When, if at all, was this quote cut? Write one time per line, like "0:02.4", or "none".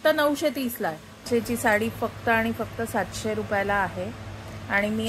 0:01.3